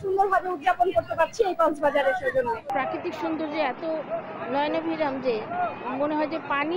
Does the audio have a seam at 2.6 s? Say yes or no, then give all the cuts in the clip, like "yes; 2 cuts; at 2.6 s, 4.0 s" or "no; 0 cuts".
yes; 1 cut; at 2.6 s